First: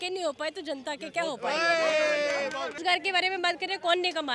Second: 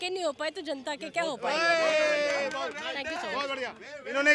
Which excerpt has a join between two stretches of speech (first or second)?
first